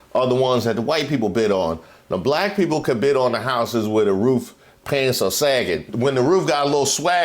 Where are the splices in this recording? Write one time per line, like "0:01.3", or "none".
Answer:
0:05.9